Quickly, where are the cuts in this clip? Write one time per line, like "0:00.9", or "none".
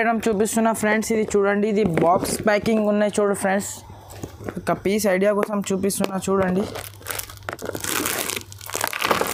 none